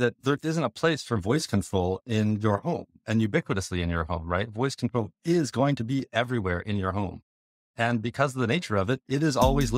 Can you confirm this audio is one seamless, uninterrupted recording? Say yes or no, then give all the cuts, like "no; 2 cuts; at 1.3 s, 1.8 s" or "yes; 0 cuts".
yes; 0 cuts